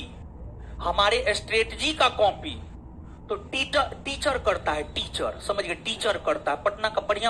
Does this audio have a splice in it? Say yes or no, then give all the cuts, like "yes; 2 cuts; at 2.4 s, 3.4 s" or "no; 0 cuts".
no; 0 cuts